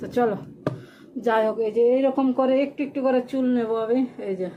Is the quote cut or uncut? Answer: uncut